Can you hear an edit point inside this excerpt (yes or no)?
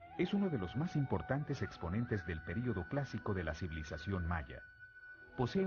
yes